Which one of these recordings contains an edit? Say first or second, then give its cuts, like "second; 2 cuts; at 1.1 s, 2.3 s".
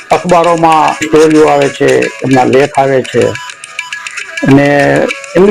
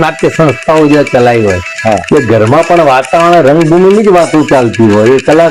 first; 1 cut; at 1.1 s